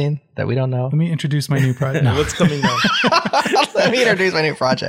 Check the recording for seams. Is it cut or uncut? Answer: uncut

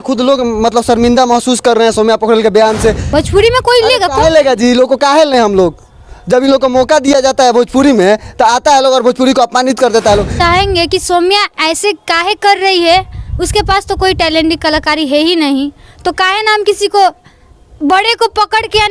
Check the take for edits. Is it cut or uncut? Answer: cut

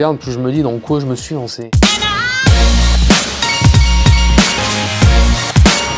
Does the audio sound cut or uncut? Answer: uncut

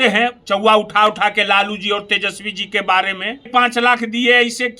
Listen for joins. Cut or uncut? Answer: cut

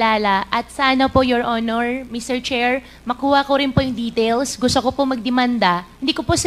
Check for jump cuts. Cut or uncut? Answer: uncut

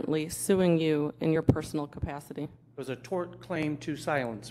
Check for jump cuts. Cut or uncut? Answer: uncut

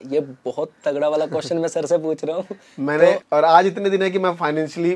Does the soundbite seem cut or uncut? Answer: cut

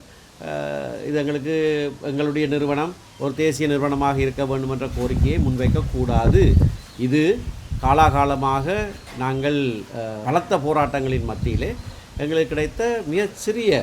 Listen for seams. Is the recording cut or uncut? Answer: cut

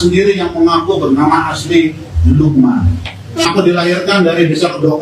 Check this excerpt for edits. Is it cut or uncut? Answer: cut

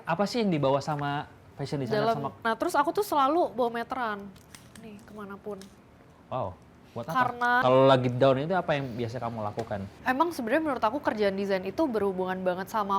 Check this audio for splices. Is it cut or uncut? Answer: cut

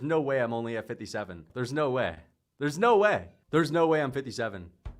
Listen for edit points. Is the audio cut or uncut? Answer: cut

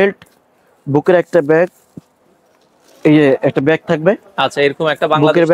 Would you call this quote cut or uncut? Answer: uncut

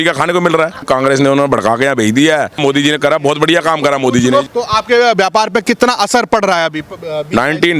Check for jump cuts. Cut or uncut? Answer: cut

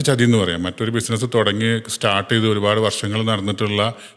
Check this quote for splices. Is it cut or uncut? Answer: uncut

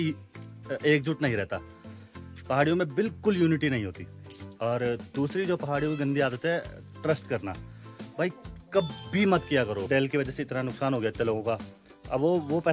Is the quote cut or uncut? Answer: cut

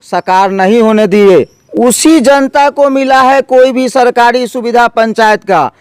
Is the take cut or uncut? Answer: cut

